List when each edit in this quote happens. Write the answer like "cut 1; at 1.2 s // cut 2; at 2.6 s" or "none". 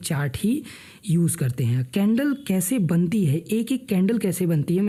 none

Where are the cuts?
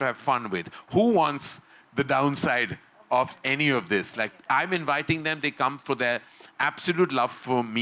none

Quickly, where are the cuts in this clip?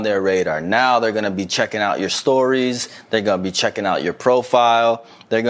none

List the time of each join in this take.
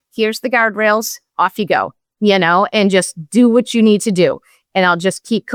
none

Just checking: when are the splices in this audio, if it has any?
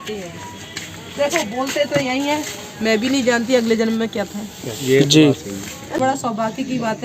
cut 1; at 6.0 s

